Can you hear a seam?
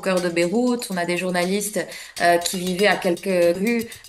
no; 0 cuts

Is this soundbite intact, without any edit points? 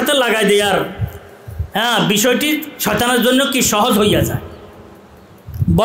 yes; 0 cuts

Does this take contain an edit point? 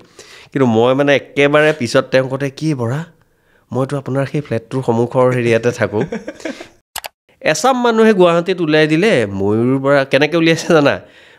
yes; 1 cut; at 6.7 s

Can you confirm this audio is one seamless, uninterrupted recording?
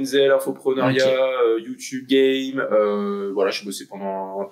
yes; 0 cuts

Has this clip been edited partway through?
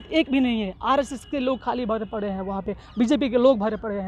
no; 0 cuts

